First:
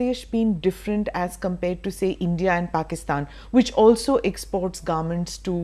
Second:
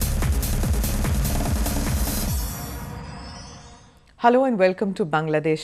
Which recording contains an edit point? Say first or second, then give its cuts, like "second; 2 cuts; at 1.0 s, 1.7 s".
second; 1 cut; at 1.8 s